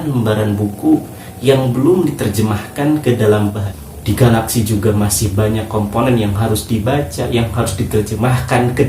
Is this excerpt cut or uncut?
cut